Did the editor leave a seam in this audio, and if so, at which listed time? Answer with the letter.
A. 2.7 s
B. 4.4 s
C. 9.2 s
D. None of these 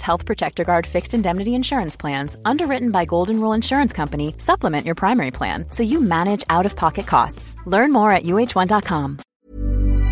C